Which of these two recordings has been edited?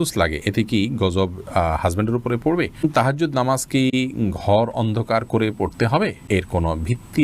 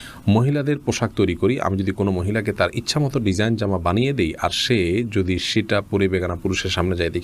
first; 2 cuts; at 2.8 s, 6.2 s

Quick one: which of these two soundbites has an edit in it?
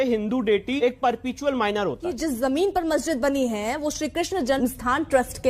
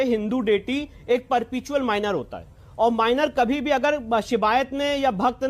first; 3 cuts; at 0.8 s, 2.1 s, 4.6 s

